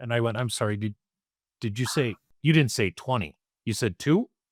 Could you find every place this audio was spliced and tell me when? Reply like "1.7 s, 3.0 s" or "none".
none